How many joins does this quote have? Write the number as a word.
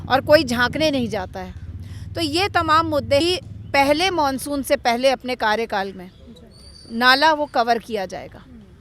one